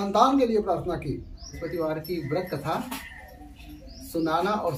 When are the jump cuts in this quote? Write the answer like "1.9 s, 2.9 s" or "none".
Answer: 1.6 s